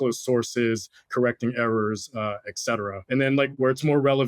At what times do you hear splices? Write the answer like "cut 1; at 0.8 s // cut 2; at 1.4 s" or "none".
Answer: cut 1; at 3.4 s